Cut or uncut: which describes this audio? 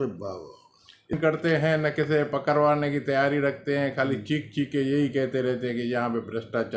cut